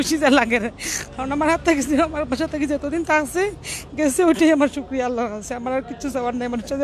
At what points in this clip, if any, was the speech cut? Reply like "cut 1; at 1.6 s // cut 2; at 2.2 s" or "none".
none